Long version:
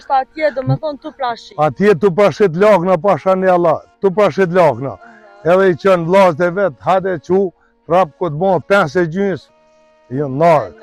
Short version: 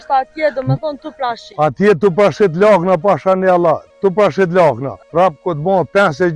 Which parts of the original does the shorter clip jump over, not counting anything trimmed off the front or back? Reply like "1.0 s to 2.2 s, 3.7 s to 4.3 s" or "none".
4.9 s to 7.7 s